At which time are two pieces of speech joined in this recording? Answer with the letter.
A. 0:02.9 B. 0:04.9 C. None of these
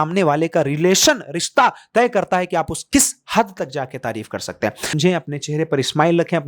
B